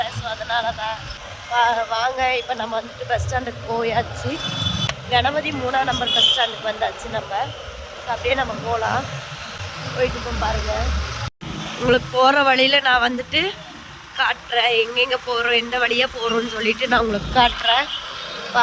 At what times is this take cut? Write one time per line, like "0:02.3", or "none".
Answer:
none